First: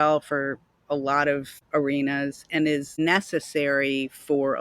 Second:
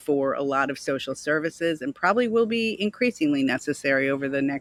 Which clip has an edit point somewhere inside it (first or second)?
first